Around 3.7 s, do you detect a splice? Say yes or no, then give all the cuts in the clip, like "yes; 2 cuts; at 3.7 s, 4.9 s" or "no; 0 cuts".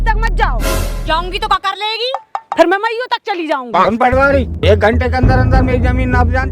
yes; 1 cut; at 3.7 s